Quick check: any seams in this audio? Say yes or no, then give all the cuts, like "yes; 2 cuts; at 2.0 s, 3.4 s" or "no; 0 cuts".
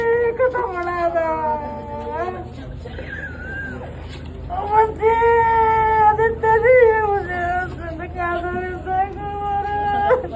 no; 0 cuts